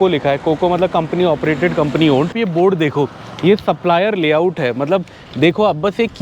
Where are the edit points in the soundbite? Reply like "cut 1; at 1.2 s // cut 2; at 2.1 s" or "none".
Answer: cut 1; at 2.3 s

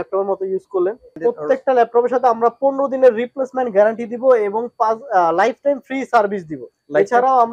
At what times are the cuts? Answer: cut 1; at 1.1 s

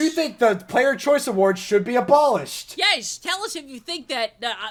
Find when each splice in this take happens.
none

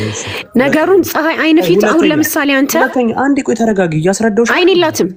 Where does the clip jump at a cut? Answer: none

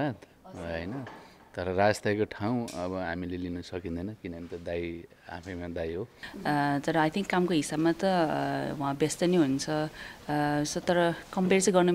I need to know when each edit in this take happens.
cut 1; at 6.3 s

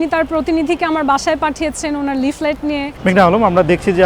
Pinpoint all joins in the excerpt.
cut 1; at 2.9 s

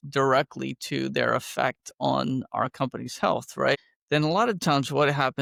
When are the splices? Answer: none

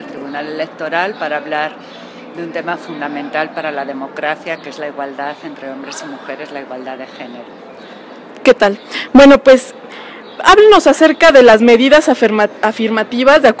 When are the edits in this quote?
cut 1; at 1.2 s

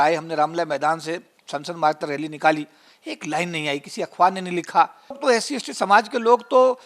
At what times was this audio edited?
cut 1; at 5.2 s

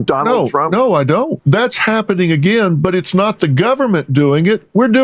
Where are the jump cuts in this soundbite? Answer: cut 1; at 1.4 s

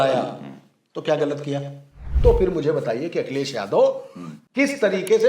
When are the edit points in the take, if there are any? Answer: cut 1; at 2.1 s

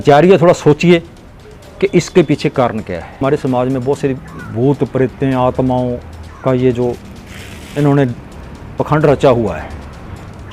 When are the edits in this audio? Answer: cut 1; at 3.2 s

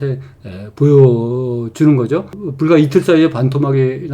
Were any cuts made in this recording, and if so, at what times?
cut 1; at 2.4 s

